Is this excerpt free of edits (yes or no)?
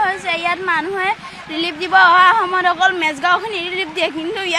yes